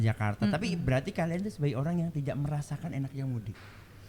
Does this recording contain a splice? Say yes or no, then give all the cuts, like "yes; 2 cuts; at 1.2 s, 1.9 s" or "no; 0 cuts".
no; 0 cuts